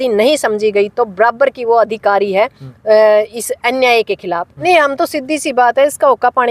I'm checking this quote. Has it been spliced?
yes; 1 cut; at 4.5 s

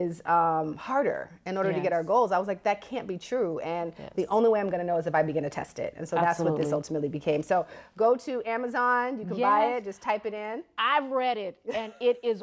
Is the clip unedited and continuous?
yes; 0 cuts

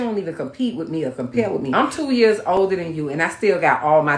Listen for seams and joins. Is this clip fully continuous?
yes; 0 cuts

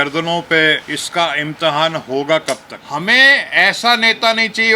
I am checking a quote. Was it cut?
yes; 2 cuts; at 0.9 s, 2.7 s

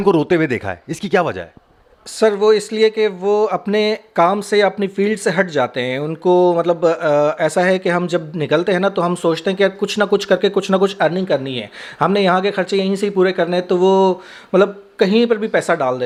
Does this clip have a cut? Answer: no; 0 cuts

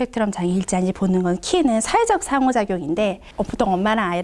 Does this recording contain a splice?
yes; 1 cut; at 3.2 s

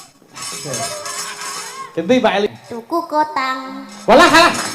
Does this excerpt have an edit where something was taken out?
yes; 1 cut; at 2.5 s

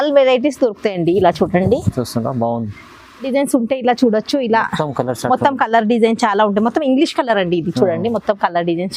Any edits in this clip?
yes; 1 cut; at 3.3 s

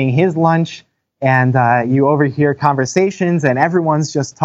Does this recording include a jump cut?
no; 0 cuts

